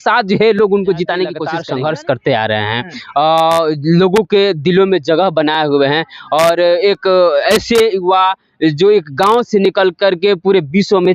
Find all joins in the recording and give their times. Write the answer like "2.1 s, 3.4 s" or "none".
1.5 s